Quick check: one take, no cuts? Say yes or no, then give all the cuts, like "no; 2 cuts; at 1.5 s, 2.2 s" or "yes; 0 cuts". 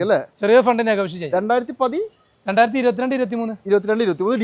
yes; 0 cuts